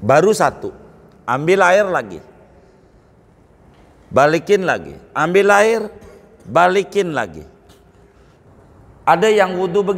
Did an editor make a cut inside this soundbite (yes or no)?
yes